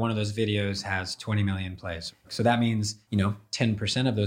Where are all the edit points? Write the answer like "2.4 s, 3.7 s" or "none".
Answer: 2.2 s, 3.0 s